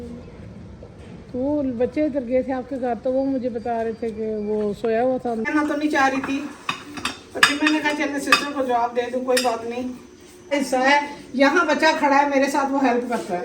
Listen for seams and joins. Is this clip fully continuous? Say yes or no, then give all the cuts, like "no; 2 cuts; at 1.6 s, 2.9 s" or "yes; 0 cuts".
no; 2 cuts; at 5.5 s, 10.5 s